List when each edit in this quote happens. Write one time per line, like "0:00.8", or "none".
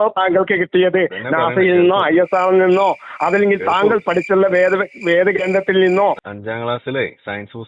0:06.2